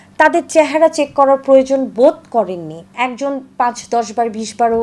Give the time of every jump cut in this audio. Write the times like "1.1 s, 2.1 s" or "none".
2.9 s